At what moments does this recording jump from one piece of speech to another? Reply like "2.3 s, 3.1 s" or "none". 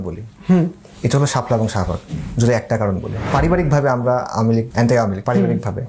3.2 s, 4.9 s